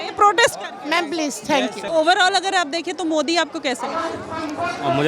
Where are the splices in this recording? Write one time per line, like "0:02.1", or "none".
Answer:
0:01.9